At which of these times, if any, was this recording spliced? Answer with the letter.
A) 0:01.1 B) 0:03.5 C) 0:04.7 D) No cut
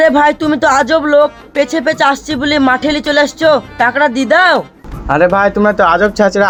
D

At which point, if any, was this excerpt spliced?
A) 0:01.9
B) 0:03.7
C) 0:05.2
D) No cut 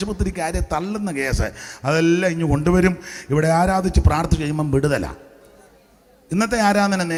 D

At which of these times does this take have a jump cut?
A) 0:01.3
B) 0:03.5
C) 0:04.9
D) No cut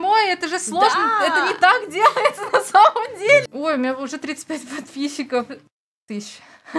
B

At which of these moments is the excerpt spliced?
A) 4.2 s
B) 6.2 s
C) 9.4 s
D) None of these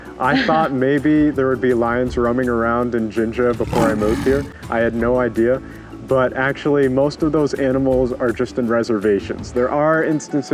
D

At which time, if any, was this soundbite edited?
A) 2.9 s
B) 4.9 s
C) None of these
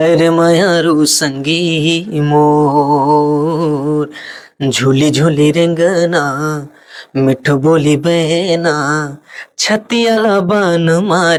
C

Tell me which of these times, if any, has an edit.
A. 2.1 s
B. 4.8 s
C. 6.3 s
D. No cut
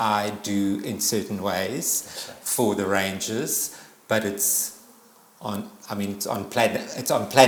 D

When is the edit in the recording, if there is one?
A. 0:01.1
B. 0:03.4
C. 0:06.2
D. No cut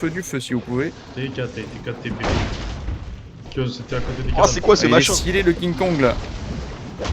B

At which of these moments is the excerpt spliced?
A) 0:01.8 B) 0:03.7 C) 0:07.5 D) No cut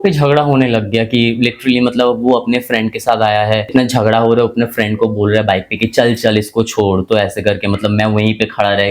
B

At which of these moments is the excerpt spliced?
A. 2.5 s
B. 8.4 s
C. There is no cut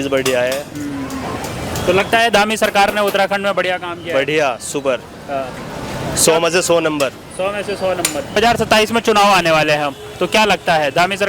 B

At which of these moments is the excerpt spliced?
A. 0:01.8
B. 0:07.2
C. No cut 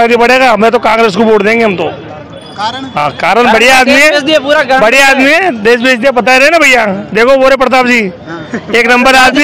C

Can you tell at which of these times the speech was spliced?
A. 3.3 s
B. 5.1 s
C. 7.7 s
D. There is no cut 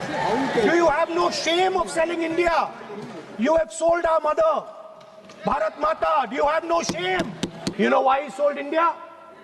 C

